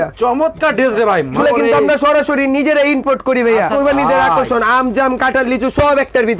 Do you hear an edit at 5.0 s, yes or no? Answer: no